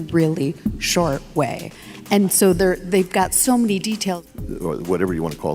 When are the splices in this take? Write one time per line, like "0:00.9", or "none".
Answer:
0:04.1